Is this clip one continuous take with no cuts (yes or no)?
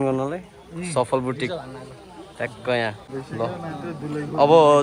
no